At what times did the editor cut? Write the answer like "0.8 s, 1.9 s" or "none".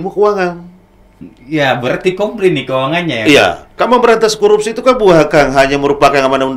3.8 s